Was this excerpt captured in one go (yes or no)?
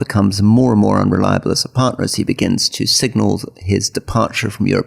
yes